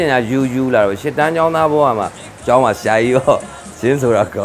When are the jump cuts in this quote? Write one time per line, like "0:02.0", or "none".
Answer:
0:02.2